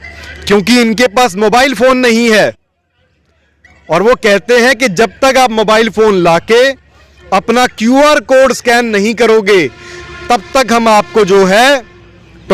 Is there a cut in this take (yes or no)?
no